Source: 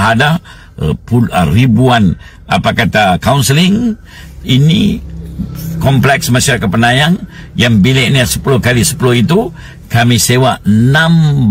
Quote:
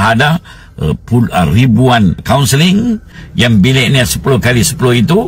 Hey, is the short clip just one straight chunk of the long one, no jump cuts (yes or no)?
no